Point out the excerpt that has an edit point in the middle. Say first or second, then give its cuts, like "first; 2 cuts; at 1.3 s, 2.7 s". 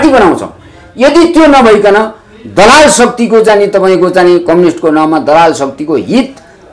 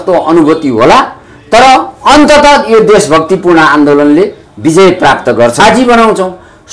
second; 1 cut; at 5.6 s